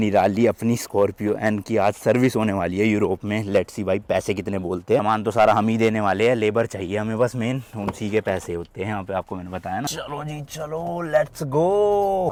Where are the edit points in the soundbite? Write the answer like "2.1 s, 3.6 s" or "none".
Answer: none

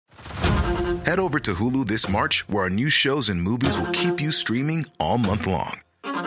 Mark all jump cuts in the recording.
none

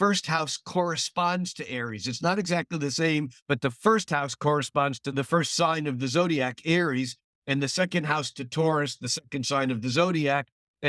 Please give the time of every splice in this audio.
3.4 s, 5.1 s

